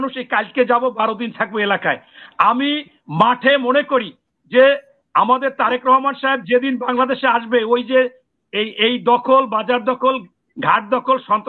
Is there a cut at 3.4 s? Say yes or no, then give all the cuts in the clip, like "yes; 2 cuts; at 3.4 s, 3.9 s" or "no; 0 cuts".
no; 0 cuts